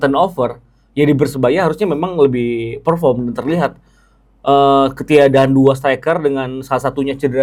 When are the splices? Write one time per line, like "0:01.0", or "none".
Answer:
none

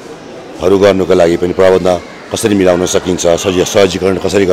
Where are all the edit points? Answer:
none

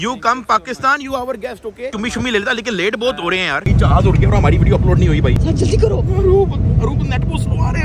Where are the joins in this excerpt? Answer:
0:01.8
0:03.6

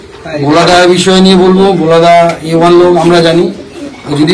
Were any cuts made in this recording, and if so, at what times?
none

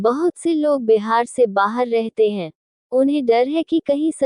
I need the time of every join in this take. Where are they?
none

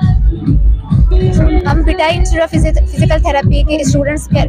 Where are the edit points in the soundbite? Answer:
none

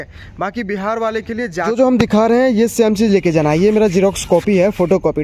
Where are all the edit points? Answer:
0:01.7

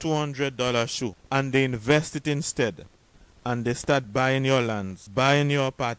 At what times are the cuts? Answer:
0:01.2
0:05.0

